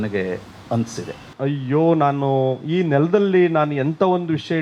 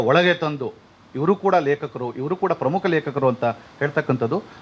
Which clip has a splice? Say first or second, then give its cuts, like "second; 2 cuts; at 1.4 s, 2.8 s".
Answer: first; 1 cut; at 1.3 s